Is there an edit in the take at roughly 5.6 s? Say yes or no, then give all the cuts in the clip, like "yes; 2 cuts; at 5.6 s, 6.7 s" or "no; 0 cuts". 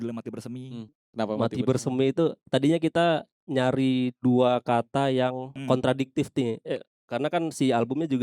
yes; 3 cuts; at 1.0 s, 3.4 s, 5.6 s